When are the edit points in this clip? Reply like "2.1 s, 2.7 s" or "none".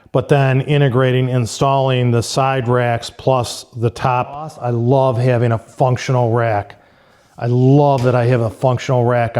4.6 s

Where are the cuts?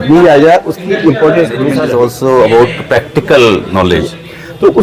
1.8 s

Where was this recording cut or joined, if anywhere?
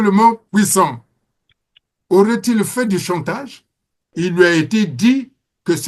4.1 s

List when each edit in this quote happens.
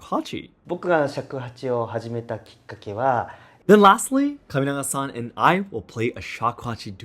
3.4 s

